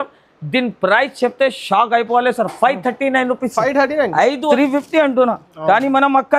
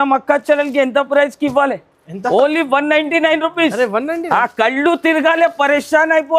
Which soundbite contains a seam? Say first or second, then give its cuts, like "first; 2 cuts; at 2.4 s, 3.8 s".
first; 1 cut; at 4.5 s